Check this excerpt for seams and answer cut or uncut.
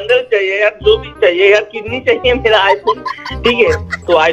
uncut